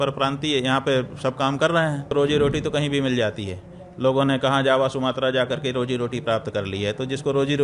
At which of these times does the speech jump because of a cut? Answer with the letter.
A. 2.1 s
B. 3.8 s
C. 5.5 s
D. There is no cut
A